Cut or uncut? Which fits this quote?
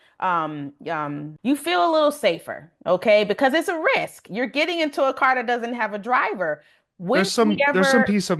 cut